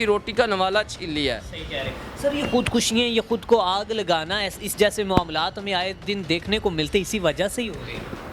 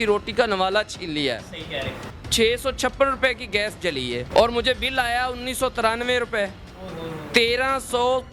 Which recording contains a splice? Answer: second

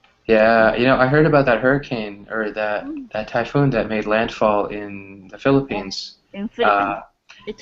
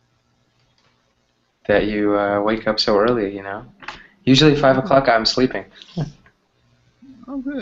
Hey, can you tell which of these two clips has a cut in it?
first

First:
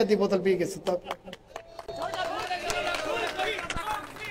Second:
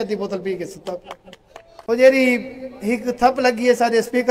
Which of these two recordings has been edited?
second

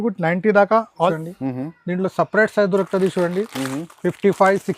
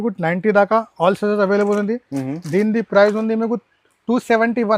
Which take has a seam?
first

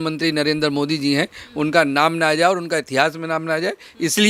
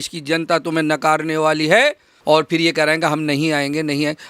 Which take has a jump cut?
second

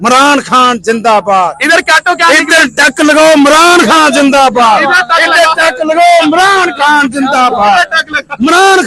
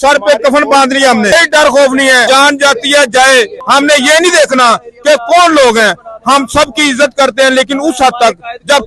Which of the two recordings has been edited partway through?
second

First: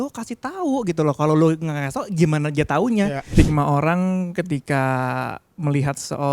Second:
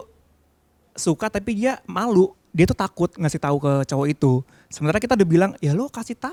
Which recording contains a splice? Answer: first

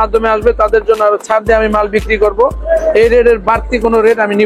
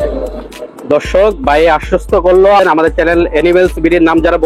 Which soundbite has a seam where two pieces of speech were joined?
second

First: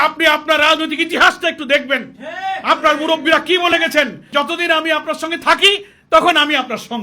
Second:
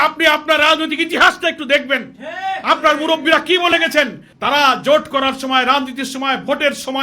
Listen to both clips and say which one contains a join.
first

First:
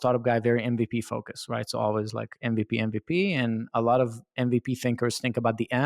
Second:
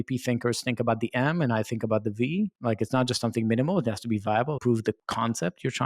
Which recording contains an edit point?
second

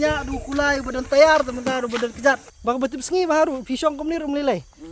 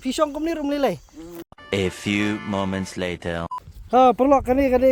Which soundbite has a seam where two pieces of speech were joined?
first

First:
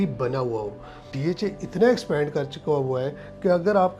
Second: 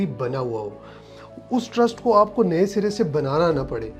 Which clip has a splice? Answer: first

